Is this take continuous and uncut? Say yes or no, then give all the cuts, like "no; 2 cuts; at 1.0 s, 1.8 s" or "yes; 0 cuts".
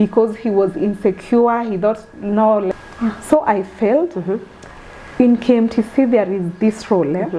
no; 1 cut; at 2.7 s